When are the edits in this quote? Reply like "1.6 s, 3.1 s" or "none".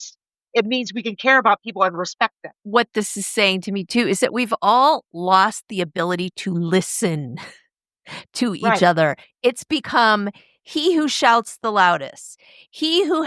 2.5 s